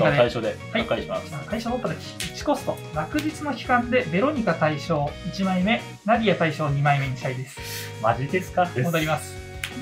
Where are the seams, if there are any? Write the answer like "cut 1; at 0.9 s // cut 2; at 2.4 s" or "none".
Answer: cut 1; at 8.7 s